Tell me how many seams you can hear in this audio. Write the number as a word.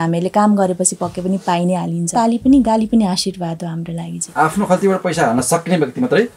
two